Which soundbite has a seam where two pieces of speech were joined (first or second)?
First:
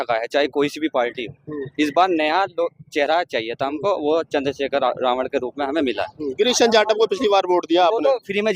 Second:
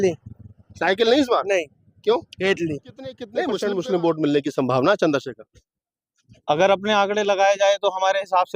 second